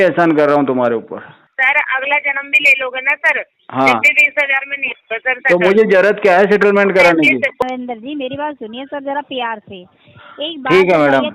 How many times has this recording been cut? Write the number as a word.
two